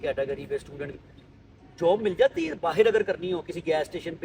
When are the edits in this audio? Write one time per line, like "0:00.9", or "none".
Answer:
none